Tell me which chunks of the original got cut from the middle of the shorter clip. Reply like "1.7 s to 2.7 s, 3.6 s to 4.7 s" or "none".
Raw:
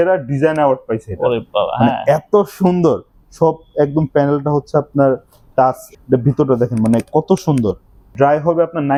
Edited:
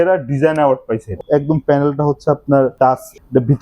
1.1 s to 3.6 s, 5.2 s to 5.5 s